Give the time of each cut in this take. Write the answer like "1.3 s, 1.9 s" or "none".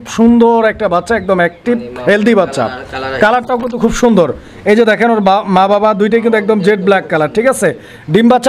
none